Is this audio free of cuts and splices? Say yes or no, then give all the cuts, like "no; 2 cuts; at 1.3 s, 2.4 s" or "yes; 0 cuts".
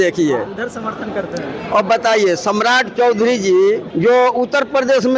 no; 1 cut; at 3.9 s